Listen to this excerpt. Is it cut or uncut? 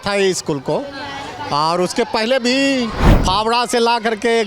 cut